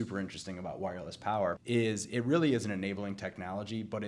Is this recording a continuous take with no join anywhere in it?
no; 1 cut; at 1.6 s

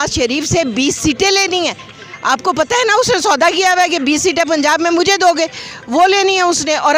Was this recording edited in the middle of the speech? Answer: no; 0 cuts

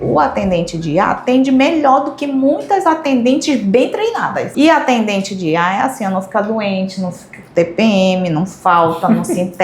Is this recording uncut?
no; 1 cut; at 4.4 s

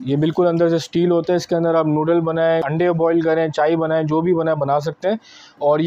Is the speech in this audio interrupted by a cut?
no; 0 cuts

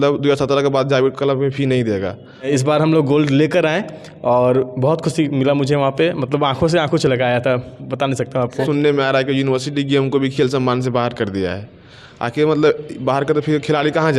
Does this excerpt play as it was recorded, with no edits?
no; 2 cuts; at 2.5 s, 8.6 s

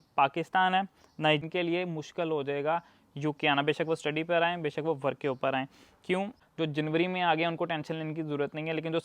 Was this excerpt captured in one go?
no; 2 cuts; at 1.4 s, 6.4 s

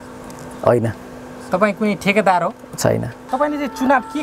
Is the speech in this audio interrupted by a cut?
yes; 1 cut; at 3.2 s

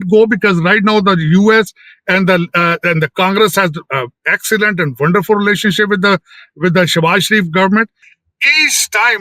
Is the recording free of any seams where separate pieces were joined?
no; 1 cut; at 8.0 s

